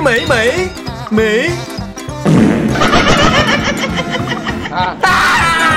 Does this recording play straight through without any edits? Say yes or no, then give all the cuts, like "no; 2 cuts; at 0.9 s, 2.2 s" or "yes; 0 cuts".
yes; 0 cuts